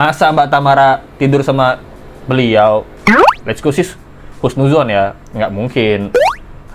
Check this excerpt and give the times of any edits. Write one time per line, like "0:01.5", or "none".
none